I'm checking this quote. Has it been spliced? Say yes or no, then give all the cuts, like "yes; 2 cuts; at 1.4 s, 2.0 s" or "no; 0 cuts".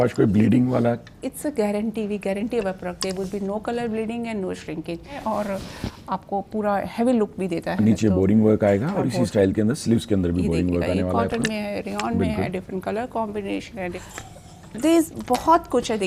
yes; 2 cuts; at 5.2 s, 14.1 s